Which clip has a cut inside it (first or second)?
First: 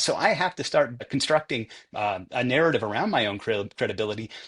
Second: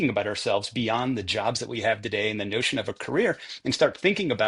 first